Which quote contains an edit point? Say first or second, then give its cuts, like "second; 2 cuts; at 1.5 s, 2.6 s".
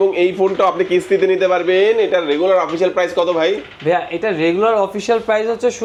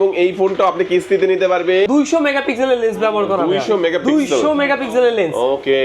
second; 1 cut; at 1.9 s